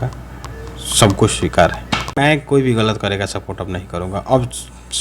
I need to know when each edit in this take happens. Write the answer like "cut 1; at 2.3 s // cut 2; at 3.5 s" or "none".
cut 1; at 2.2 s